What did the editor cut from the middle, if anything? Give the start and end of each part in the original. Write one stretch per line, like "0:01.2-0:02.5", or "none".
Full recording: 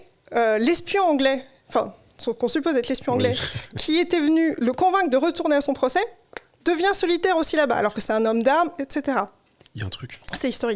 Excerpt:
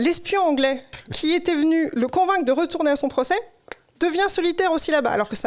0:01.5-0:03.6